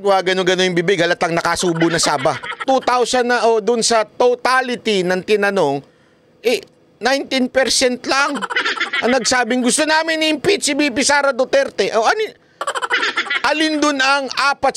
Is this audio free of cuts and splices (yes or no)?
no